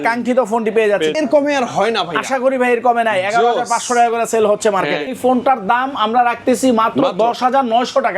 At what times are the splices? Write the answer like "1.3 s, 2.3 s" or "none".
1.2 s, 5.1 s

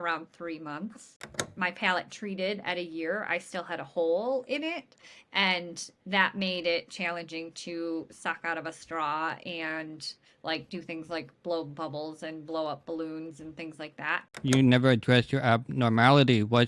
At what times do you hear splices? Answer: 1.2 s, 14.2 s

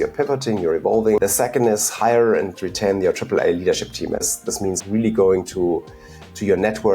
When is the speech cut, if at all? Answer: 1.2 s, 4.5 s

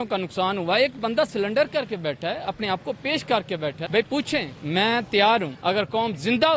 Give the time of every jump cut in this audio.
3.8 s, 4.5 s, 5.5 s

